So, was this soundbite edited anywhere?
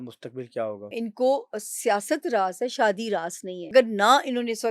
yes; 2 cuts; at 1.0 s, 3.7 s

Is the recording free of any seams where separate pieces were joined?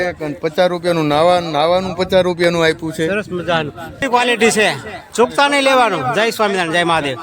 no; 1 cut; at 4.0 s

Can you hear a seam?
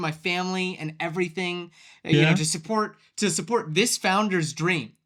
no; 0 cuts

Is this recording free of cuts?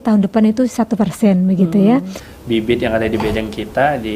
no; 1 cut; at 2.2 s

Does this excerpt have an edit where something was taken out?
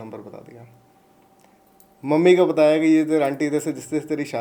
no; 0 cuts

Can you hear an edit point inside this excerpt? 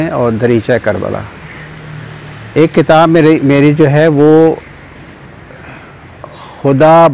no; 0 cuts

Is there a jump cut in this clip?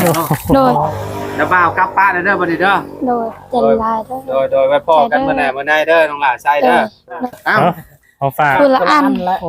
yes; 2 cuts; at 0.9 s, 7.2 s

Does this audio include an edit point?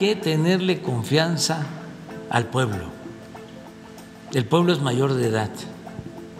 no; 0 cuts

